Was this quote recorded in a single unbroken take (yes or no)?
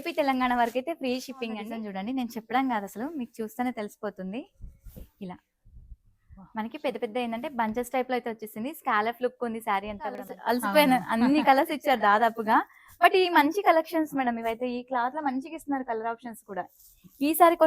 no